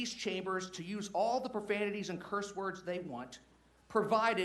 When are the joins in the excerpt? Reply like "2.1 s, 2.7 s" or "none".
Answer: none